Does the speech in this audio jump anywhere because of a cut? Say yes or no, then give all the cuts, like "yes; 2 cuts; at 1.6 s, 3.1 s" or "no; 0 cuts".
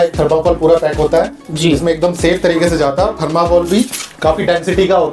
no; 0 cuts